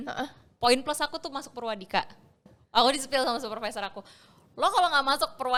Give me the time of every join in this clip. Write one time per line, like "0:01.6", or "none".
none